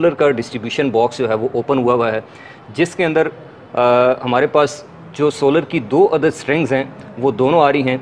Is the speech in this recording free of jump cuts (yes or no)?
yes